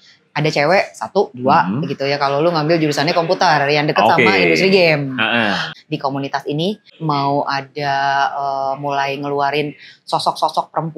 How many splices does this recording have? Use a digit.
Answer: 2